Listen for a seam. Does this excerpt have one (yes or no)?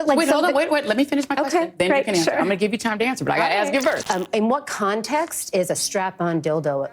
yes